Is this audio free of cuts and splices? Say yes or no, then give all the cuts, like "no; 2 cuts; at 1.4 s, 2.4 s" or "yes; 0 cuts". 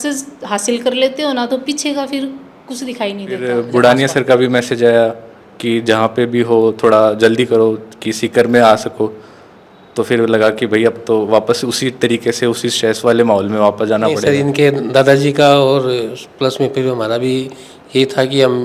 no; 2 cuts; at 3.4 s, 14.2 s